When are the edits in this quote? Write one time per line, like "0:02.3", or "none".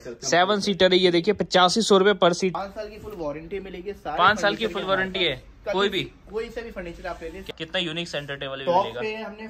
0:02.5
0:07.5